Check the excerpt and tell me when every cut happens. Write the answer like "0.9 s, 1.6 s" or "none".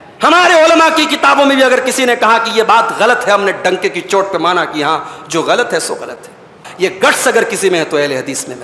6.7 s